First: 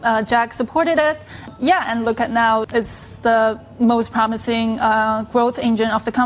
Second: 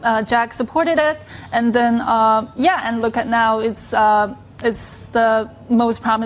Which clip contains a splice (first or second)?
first